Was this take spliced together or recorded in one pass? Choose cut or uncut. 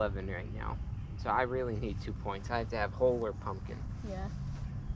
uncut